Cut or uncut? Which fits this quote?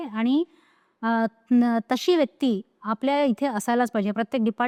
uncut